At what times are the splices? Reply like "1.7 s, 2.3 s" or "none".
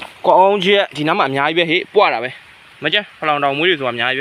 none